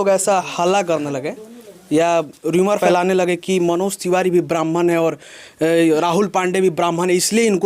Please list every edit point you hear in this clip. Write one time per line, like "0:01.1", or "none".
0:02.8